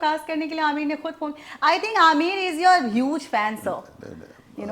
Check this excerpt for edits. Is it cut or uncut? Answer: uncut